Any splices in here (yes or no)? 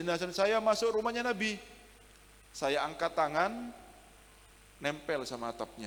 no